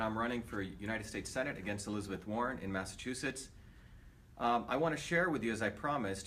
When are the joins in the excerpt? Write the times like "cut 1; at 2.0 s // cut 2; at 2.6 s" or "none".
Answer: none

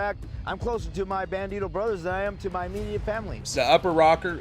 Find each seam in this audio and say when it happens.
cut 1; at 3.4 s

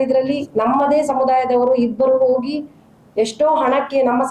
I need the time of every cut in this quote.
none

